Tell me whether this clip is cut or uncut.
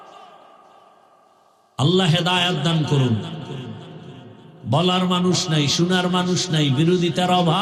uncut